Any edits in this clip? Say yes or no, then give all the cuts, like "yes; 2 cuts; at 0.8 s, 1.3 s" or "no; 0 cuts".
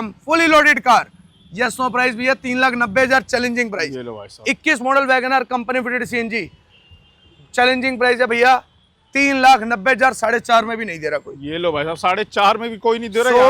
no; 0 cuts